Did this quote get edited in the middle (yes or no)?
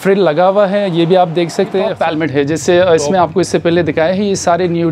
yes